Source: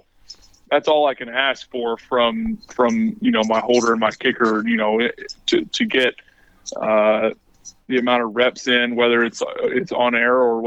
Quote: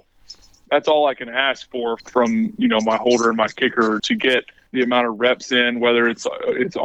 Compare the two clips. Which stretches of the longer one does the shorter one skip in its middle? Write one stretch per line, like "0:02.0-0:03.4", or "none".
0:02.0-0:02.7
0:04.8-0:07.3